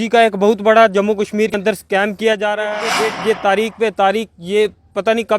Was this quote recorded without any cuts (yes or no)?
no